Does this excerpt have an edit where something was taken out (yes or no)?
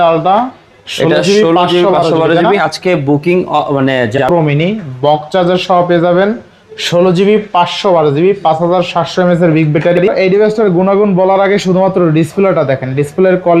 yes